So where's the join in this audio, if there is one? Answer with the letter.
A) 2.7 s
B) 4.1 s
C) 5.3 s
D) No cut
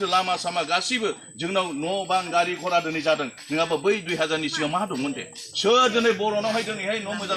D